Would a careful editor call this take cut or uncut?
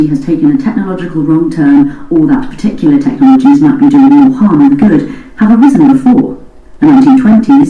cut